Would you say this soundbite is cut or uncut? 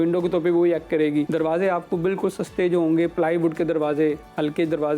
cut